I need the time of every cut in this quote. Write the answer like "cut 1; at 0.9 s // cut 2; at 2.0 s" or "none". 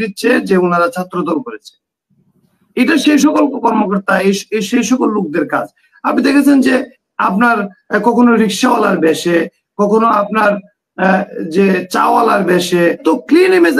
cut 1; at 12.8 s